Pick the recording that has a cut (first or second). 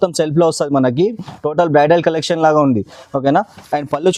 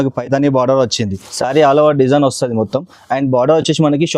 second